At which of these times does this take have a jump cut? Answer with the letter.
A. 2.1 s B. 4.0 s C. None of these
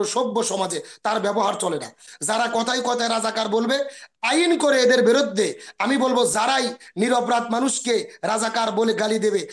A